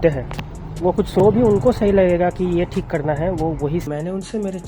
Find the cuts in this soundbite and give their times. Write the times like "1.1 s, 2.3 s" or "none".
1.2 s, 3.9 s